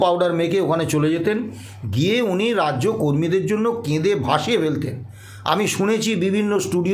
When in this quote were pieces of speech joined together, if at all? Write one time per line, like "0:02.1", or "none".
none